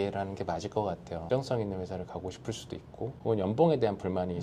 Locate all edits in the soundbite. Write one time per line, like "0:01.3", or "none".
0:01.3

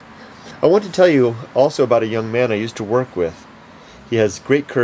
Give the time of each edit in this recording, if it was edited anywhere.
0:03.7

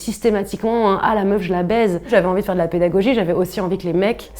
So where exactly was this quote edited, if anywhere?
0:02.0

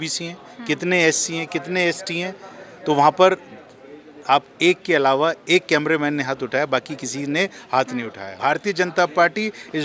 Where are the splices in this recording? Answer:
0:08.2

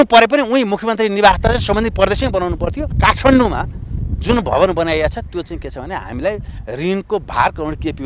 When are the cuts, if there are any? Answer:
0:02.9

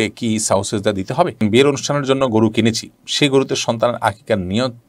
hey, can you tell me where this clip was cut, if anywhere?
0:01.4

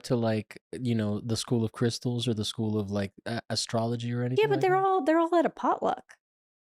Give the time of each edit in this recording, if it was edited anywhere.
none

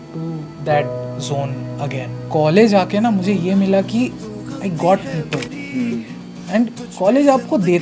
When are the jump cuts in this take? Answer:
0:02.2

